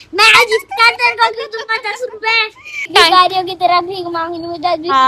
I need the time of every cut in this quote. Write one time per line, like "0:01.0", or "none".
0:02.9